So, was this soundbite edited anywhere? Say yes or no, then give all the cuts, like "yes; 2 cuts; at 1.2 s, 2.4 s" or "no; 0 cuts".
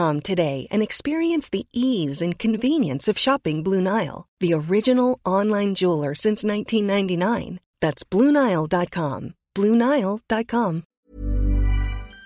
yes; 1 cut; at 10.9 s